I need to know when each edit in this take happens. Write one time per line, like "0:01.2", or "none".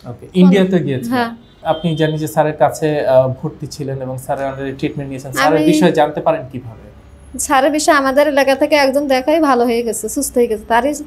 0:01.6